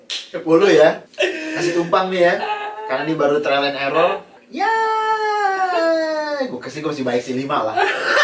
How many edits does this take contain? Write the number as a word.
two